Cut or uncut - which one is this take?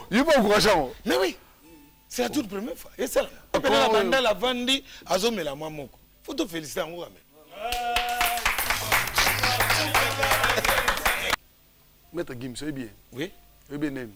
cut